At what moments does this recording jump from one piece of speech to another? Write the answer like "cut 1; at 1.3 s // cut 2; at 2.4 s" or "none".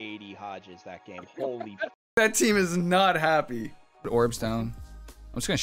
cut 1; at 2.2 s // cut 2; at 4.1 s